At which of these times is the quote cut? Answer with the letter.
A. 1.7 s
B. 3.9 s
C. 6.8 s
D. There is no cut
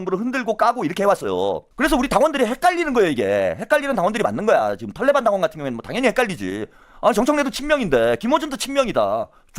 A